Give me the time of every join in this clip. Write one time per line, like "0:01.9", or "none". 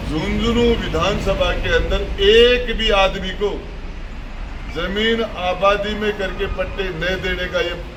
none

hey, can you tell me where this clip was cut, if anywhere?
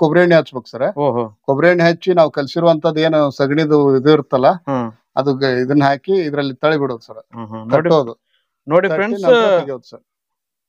none

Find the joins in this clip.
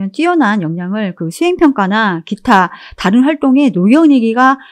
none

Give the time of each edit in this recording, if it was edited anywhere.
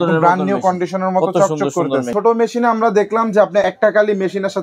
0:02.1
0:03.6

